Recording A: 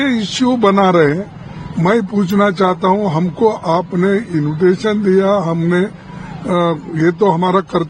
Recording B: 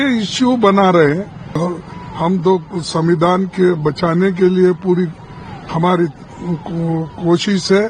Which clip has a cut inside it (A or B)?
B